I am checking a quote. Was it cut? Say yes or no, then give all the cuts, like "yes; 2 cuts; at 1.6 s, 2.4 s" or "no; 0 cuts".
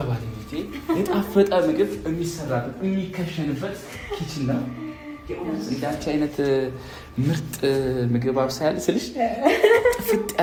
no; 0 cuts